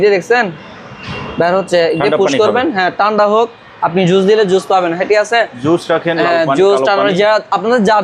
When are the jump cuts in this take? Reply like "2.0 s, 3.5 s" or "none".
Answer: none